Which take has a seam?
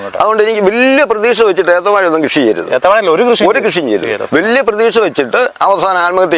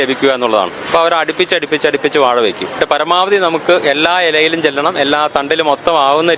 second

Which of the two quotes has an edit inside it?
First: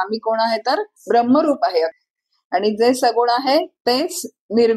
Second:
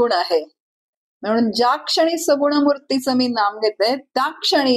first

